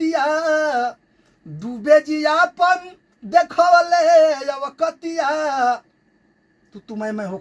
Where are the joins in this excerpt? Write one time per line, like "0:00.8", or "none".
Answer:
none